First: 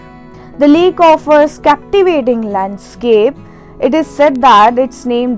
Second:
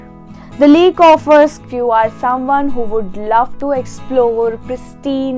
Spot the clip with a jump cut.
second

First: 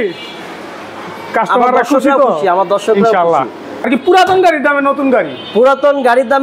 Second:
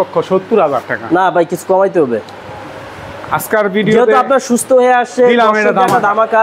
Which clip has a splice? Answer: first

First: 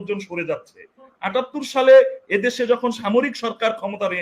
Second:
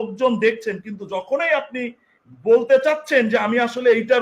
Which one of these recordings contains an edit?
first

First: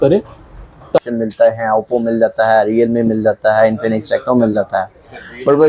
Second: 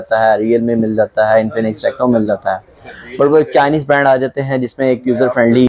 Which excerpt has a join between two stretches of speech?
first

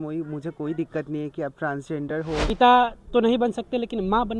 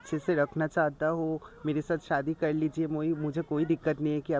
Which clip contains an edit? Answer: first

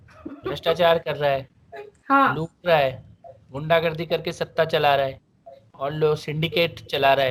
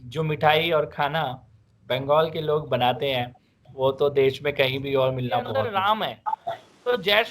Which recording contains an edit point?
second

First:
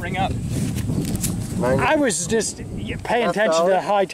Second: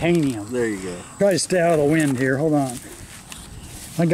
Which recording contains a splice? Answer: second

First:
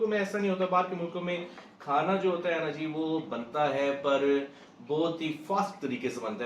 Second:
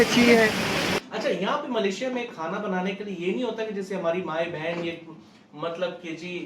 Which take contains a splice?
second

